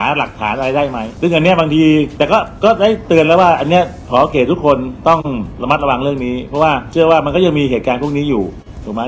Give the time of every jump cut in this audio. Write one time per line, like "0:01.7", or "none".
0:01.1
0:02.1
0:05.5
0:06.9